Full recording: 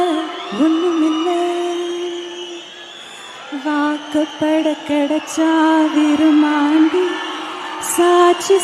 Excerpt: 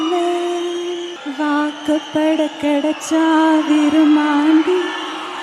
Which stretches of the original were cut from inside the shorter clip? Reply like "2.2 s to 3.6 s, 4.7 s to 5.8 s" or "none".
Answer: 2.3 s to 3.4 s